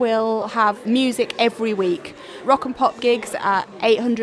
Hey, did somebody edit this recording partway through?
no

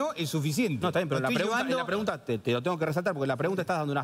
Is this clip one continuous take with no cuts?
yes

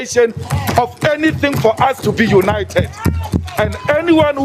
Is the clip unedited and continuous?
yes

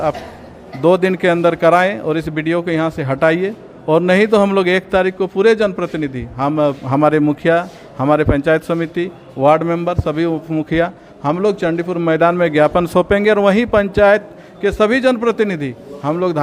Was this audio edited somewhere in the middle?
no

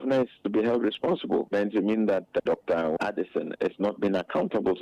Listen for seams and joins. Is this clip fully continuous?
no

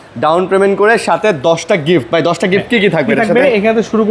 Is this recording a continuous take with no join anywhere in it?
yes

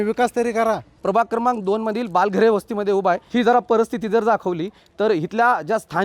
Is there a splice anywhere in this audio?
yes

